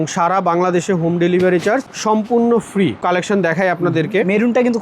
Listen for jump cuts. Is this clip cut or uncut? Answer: cut